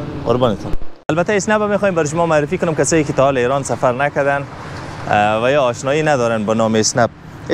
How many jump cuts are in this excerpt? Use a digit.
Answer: 1